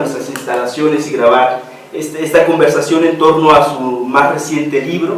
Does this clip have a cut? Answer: yes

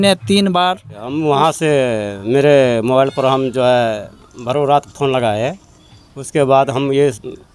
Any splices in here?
yes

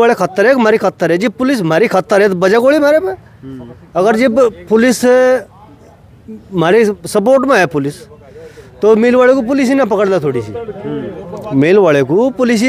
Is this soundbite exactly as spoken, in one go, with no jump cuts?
yes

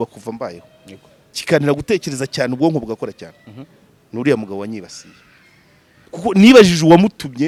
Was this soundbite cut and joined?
no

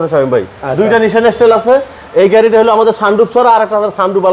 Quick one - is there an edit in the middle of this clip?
no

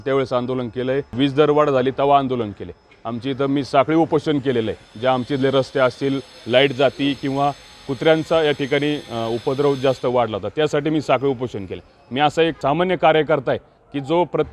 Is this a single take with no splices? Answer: no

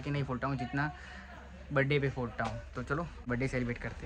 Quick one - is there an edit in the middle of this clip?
yes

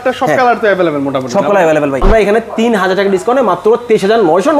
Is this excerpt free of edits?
no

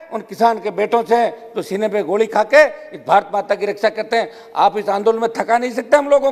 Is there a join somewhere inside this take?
no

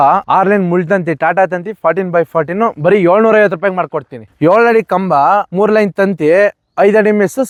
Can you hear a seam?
no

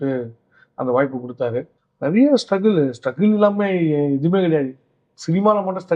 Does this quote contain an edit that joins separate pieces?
yes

